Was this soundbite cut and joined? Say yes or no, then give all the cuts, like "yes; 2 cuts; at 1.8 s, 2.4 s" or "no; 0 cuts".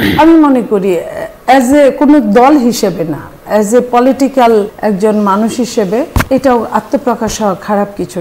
yes; 2 cuts; at 4.7 s, 6.2 s